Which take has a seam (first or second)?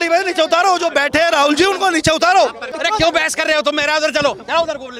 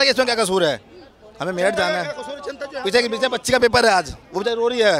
first